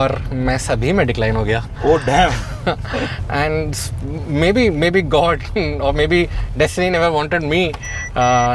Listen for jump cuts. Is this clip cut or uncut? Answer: uncut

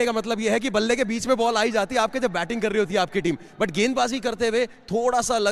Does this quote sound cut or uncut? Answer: uncut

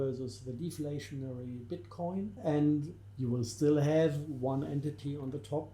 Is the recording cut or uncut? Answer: cut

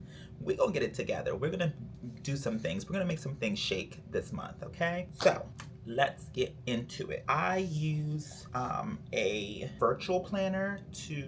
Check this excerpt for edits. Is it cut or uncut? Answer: uncut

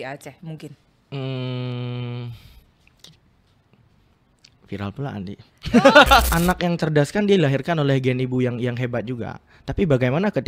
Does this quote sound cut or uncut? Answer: cut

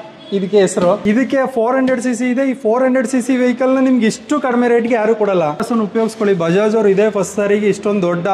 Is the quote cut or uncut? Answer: cut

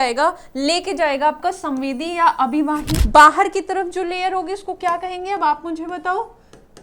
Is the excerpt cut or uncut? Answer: cut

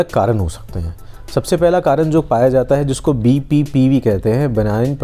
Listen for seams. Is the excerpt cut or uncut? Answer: uncut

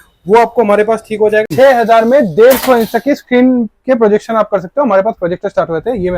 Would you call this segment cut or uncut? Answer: cut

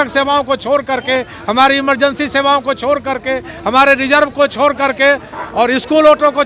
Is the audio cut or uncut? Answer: uncut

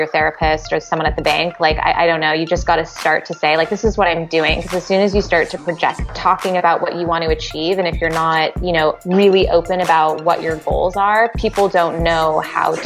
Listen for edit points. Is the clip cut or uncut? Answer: cut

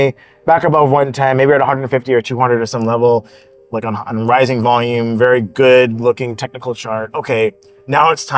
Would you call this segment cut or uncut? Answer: uncut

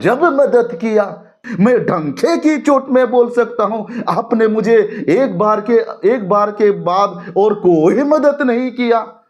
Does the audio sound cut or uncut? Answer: cut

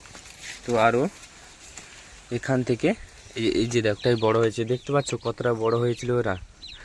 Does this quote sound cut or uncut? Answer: cut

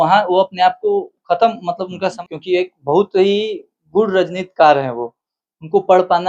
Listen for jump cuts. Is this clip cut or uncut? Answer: cut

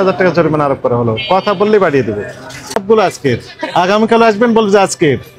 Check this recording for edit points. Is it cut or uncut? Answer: cut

